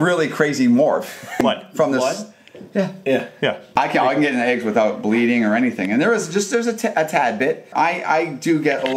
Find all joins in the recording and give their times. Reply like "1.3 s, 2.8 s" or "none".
1.4 s, 3.7 s, 7.7 s